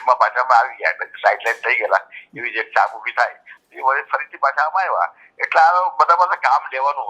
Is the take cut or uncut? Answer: uncut